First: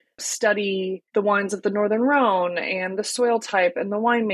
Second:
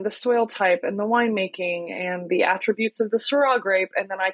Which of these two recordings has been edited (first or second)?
first